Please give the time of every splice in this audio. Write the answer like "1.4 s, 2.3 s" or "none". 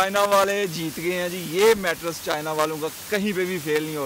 none